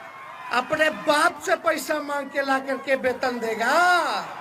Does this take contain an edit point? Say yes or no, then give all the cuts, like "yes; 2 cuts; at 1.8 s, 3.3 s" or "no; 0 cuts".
no; 0 cuts